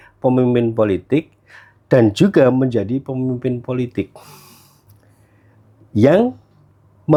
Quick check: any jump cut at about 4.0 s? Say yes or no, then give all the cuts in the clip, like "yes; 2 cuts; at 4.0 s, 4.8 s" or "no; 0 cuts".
no; 0 cuts